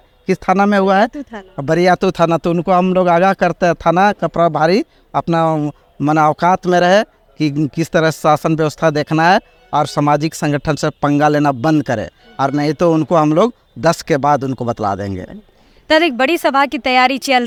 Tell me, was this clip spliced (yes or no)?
no